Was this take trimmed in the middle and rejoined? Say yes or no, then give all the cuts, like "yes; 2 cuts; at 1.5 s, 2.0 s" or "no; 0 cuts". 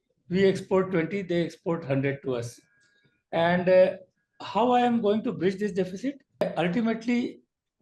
yes; 1 cut; at 6.4 s